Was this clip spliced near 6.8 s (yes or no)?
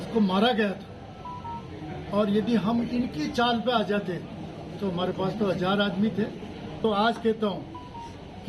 yes